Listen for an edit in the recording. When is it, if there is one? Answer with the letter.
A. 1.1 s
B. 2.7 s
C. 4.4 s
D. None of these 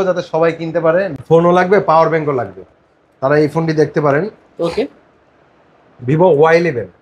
A